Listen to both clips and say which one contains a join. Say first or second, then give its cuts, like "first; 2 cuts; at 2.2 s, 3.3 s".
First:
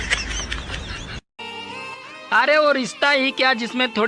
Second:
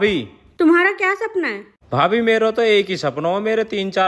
first; 1 cut; at 1.4 s